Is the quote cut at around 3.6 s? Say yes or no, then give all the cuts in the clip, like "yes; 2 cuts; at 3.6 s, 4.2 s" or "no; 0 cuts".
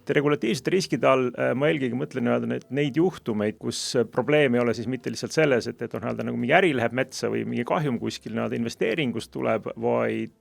yes; 1 cut; at 3.6 s